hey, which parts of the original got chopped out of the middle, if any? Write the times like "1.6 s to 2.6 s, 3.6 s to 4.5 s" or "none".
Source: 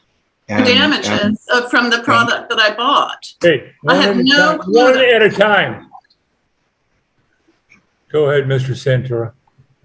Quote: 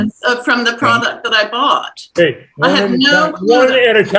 none